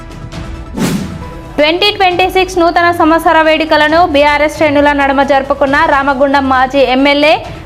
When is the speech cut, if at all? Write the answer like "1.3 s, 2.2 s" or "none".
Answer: 0.9 s